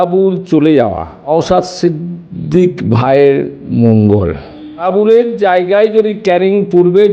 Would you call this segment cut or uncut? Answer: cut